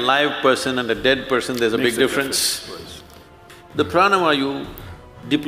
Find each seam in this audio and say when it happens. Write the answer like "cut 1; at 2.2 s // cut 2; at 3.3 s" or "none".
cut 1; at 3.4 s